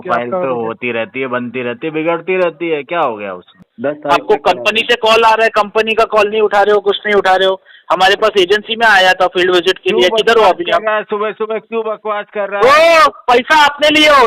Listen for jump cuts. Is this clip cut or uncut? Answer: cut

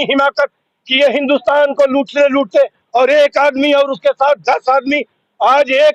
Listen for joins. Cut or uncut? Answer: uncut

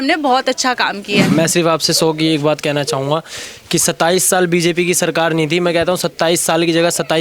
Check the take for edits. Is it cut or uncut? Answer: cut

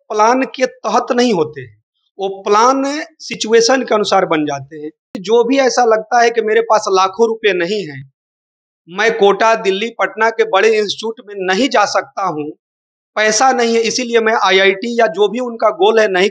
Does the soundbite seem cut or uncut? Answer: cut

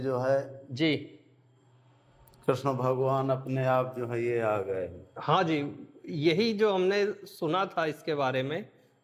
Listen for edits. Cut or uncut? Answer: uncut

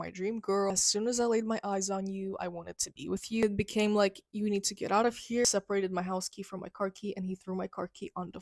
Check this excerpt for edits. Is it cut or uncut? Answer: cut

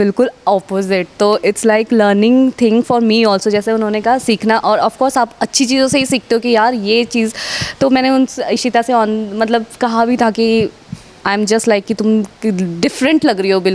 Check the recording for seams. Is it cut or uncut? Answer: uncut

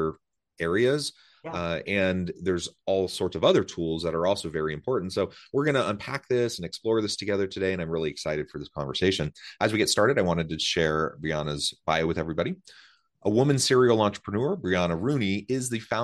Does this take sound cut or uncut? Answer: uncut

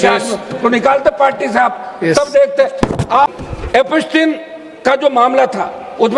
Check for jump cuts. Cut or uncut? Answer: cut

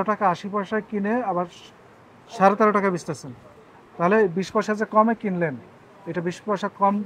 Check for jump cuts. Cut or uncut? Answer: uncut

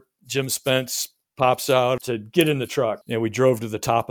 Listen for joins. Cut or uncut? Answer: cut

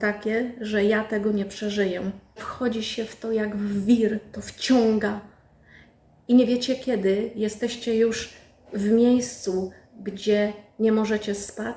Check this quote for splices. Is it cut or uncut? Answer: cut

